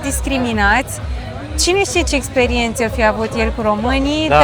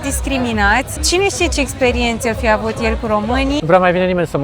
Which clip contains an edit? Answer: second; 2 cuts; at 1.0 s, 3.6 s

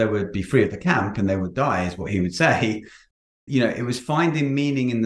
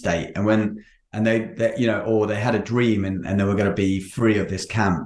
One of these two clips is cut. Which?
first; 1 cut; at 3.1 s

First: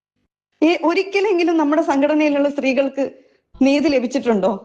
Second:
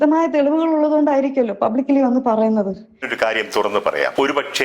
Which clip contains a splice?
second; 1 cut; at 3.0 s

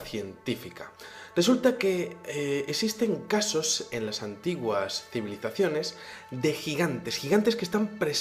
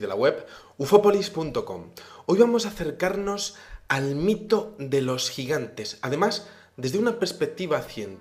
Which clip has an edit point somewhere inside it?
first; 1 cut; at 7.0 s

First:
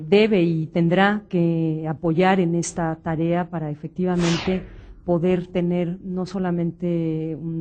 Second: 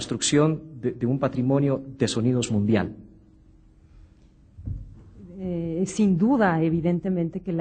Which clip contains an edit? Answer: second; 1 cut; at 4.6 s

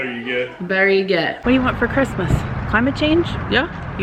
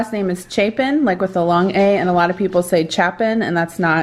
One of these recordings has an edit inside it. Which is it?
first; 1 cut; at 1.4 s

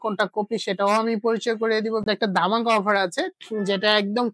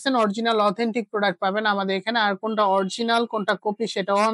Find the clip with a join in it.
first; 1 cut; at 2.0 s

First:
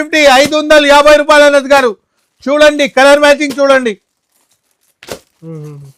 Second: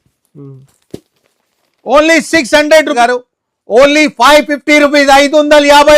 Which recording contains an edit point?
second; 1 cut; at 2.9 s

